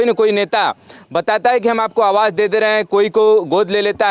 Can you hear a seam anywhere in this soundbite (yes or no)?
no